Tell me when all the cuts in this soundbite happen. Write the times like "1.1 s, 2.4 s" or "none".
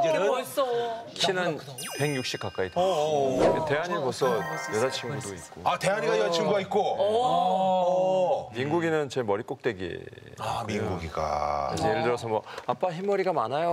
1.0 s, 3.6 s